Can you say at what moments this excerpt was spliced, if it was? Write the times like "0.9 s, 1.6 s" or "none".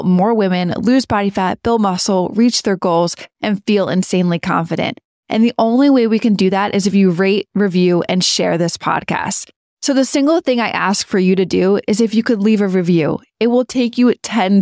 none